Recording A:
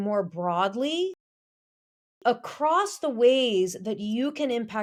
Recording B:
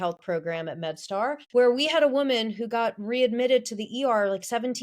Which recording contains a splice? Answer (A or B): B